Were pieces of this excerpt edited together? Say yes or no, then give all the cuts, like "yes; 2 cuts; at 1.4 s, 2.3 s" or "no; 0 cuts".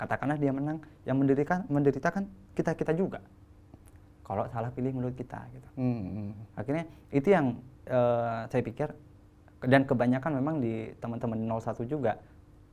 no; 0 cuts